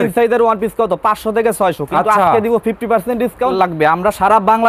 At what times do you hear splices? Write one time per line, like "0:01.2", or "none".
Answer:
0:03.5